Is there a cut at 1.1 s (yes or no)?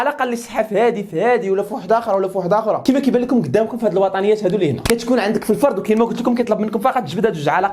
no